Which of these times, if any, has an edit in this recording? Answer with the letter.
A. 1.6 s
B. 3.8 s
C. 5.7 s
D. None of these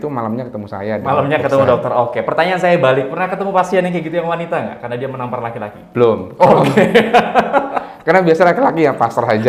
D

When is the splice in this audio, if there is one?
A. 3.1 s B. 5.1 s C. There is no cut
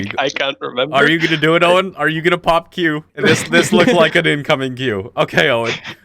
A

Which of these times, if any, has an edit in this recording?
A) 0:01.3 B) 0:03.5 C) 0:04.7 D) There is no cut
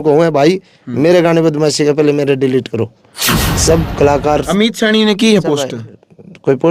B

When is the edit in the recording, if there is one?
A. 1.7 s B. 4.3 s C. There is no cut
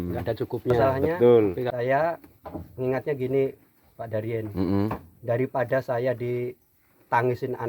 A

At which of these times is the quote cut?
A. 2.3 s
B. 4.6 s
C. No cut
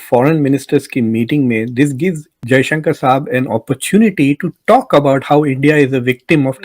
A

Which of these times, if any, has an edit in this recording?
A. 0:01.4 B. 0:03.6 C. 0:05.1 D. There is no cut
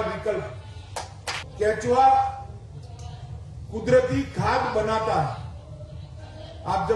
A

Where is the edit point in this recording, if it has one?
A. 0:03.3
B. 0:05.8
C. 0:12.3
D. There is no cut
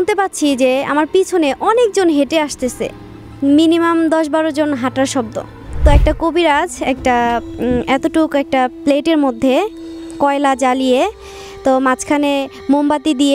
B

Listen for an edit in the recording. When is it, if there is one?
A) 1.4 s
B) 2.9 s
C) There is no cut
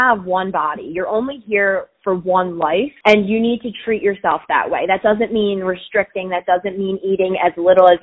B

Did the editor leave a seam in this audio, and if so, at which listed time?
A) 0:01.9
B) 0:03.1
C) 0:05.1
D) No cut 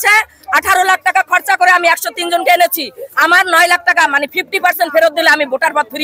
D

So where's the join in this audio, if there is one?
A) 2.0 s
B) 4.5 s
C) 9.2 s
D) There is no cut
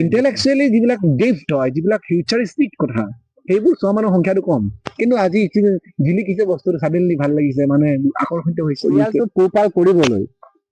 C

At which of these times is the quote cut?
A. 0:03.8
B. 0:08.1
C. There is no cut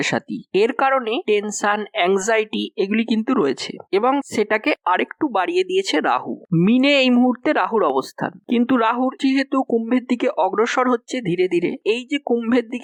C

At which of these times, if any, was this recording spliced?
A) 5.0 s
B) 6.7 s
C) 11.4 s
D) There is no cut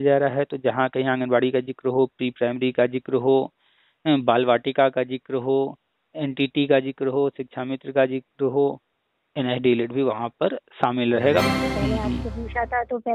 C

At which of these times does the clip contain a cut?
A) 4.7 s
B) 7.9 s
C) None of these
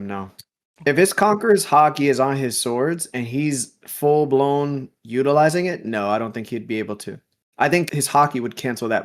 B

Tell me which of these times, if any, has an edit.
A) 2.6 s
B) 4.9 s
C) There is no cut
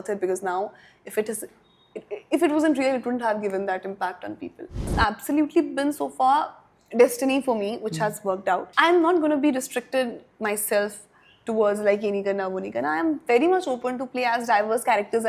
B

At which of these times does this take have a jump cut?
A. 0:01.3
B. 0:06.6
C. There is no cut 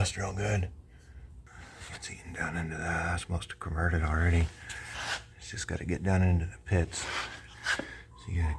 A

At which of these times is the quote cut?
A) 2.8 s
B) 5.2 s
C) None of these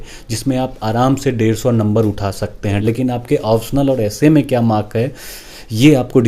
A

